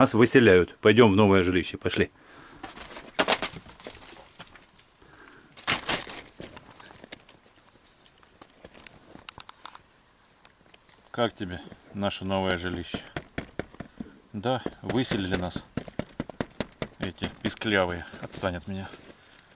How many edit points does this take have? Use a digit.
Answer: 0